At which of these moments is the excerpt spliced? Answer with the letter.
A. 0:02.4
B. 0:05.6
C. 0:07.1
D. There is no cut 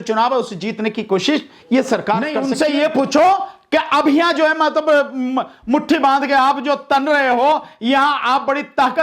A